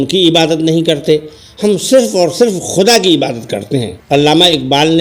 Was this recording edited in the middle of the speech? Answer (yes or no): yes